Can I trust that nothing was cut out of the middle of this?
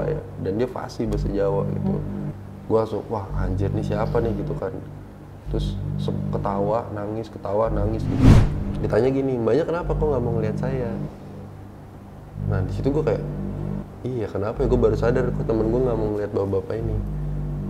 no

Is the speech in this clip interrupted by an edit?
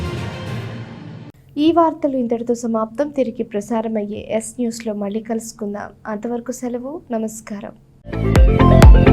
no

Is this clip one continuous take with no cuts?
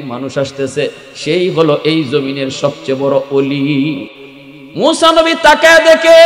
no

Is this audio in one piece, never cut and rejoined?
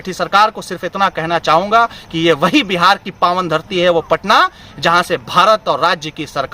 yes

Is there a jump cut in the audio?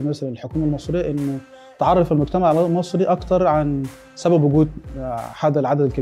no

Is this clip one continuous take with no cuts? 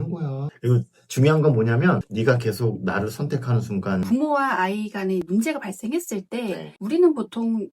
no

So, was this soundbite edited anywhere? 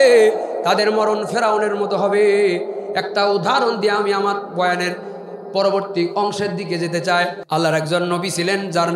yes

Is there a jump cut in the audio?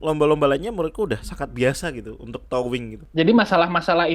yes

